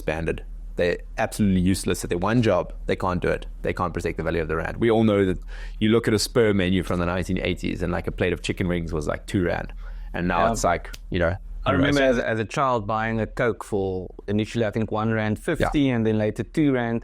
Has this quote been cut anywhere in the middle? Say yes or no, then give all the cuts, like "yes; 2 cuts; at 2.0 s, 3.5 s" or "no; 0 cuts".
no; 0 cuts